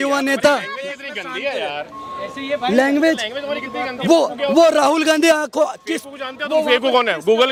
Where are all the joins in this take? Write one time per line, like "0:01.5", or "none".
none